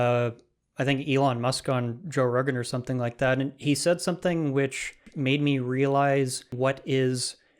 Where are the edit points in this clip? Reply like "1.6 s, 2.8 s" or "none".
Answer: 5.1 s, 6.5 s